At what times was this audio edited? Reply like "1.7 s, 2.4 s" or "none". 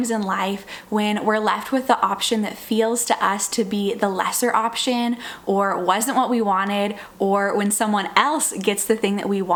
none